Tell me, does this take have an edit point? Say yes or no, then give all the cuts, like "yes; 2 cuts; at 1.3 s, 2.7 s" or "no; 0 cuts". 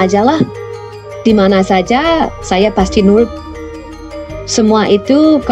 no; 0 cuts